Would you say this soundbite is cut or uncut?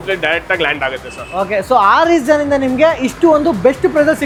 uncut